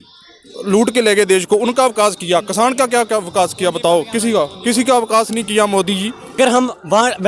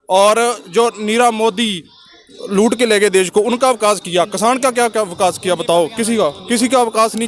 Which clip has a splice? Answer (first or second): first